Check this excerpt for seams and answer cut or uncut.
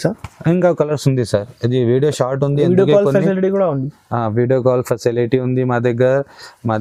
uncut